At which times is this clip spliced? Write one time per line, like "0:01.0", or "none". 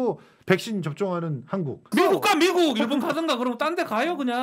0:01.9